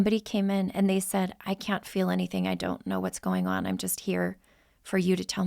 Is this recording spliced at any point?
yes; 1 cut; at 1.4 s

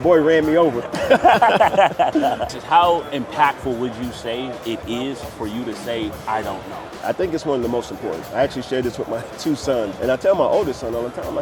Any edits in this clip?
yes; 4 cuts; at 2.6 s, 6.9 s, 8.2 s, 9.9 s

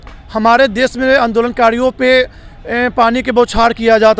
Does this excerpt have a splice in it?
no; 0 cuts

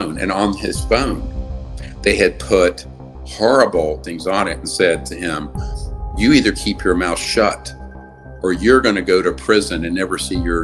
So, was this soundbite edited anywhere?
no; 0 cuts

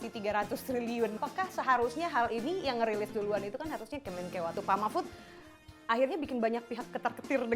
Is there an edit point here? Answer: yes; 2 cuts; at 1.2 s, 4.5 s

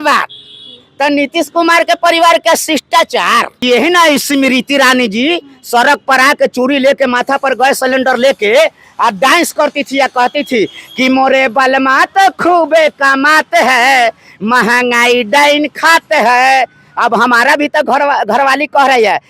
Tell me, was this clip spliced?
yes; 1 cut; at 3.6 s

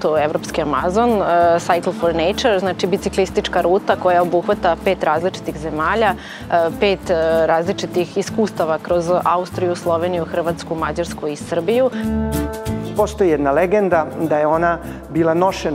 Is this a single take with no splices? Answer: no; 1 cut; at 12.2 s

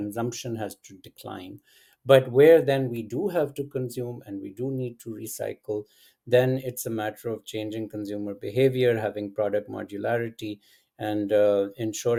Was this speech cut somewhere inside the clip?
no; 0 cuts

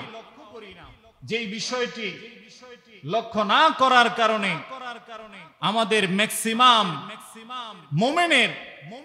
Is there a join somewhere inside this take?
no; 0 cuts

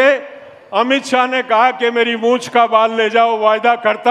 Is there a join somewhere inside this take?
no; 0 cuts

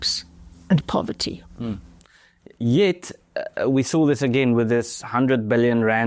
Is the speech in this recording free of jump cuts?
yes; 0 cuts

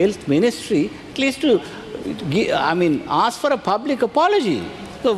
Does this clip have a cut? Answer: no; 0 cuts

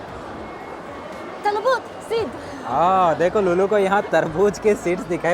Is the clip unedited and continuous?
yes; 0 cuts

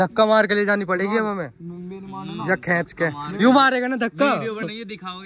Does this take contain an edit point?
no; 0 cuts

